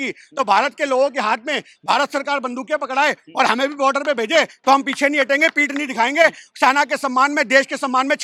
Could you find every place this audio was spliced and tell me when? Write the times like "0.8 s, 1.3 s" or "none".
none